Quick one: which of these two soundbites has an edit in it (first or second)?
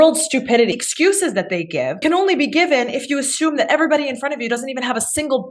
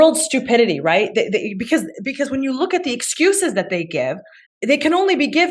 first